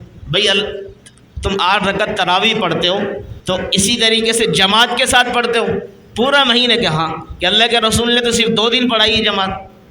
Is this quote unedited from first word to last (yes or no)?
no